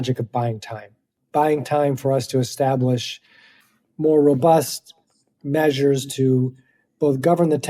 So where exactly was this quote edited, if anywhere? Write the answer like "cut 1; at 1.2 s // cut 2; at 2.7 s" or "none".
none